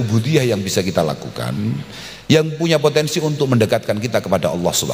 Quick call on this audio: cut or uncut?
uncut